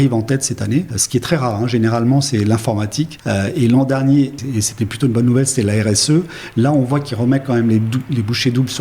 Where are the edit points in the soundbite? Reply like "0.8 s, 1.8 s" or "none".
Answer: 1.0 s, 3.2 s, 4.4 s